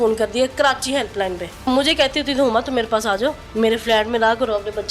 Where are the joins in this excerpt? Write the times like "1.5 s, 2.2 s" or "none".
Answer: 1.7 s, 3.4 s